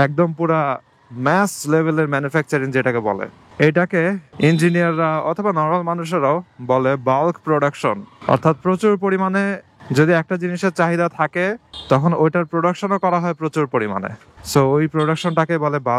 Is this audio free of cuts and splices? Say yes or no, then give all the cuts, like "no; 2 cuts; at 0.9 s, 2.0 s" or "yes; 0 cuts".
yes; 0 cuts